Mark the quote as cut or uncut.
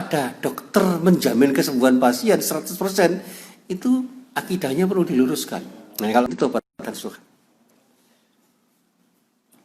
cut